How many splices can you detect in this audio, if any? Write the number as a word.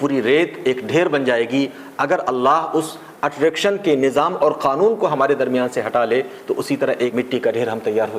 one